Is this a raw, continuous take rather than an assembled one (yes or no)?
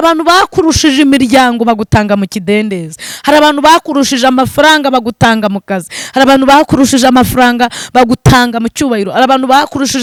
yes